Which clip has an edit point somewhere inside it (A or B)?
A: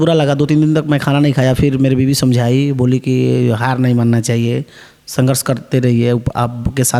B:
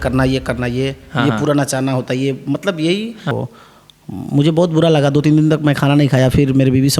B